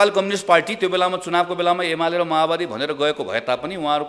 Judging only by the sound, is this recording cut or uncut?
uncut